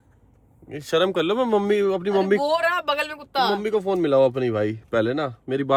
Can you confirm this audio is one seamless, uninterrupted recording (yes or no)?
yes